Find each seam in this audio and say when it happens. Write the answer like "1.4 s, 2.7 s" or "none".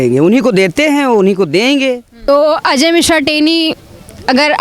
2.1 s